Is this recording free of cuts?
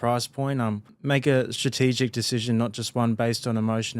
no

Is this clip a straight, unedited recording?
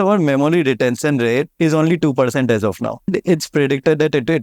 no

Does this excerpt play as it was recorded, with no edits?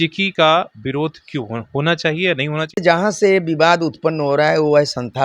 no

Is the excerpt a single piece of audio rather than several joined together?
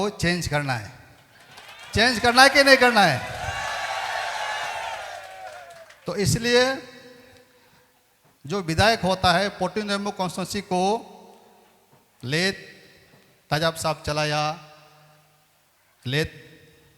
yes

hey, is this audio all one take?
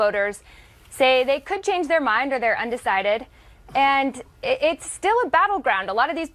yes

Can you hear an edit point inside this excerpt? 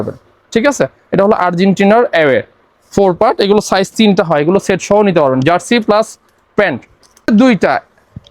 yes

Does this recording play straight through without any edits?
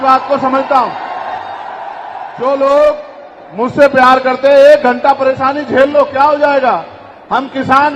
no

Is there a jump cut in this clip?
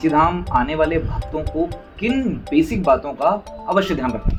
no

